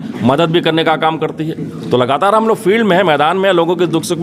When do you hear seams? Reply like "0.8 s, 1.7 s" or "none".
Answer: none